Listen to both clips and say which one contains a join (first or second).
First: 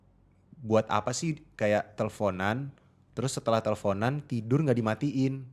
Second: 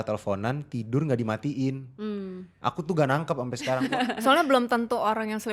second